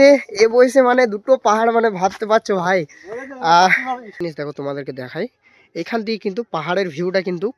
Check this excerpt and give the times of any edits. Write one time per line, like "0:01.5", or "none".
0:04.2

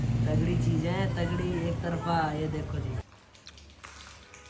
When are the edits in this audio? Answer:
0:03.0

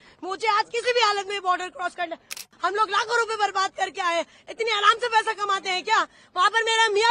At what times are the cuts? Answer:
0:02.4

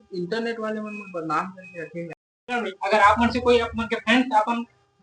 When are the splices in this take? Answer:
0:02.2

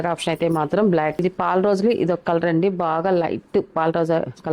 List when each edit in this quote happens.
0:01.2

